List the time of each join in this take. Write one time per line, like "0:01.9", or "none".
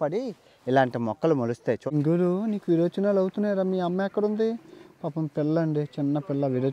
0:01.8